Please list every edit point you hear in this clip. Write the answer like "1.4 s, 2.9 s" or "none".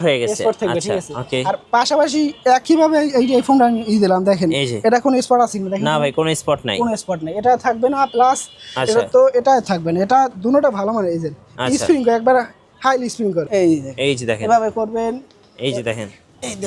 13.5 s